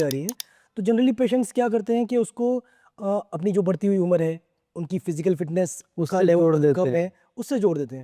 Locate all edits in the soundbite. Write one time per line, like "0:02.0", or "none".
none